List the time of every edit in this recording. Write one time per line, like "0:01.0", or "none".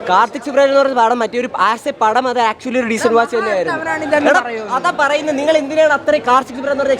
none